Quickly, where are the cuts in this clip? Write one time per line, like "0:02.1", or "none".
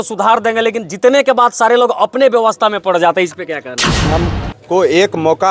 0:04.1